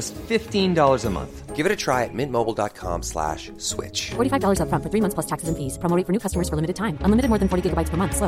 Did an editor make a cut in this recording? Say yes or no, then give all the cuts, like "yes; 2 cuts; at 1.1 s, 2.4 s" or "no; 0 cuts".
no; 0 cuts